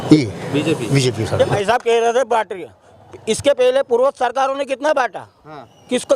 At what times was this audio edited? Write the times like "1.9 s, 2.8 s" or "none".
1.3 s